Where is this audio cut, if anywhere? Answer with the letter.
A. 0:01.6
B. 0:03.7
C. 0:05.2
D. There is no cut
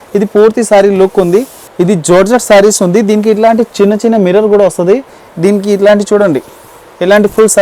A